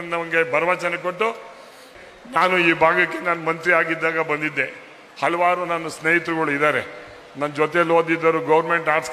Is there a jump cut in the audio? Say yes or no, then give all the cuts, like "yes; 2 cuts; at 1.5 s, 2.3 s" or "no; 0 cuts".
yes; 1 cut; at 1.8 s